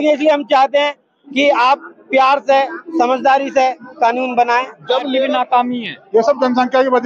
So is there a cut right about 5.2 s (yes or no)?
yes